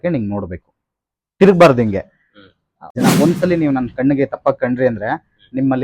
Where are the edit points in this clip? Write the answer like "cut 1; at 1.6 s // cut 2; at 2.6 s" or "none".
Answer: cut 1; at 2.9 s